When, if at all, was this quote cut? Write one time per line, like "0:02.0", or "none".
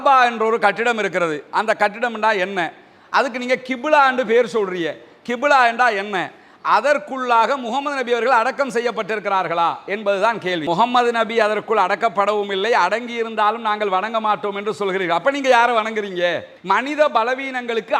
0:10.6
0:16.5